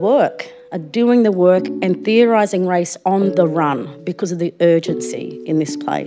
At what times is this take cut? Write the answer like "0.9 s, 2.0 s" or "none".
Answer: none